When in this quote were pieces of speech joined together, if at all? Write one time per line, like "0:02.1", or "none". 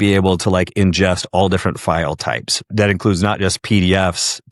0:02.5